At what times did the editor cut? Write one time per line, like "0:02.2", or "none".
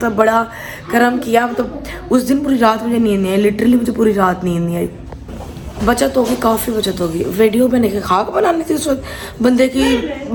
none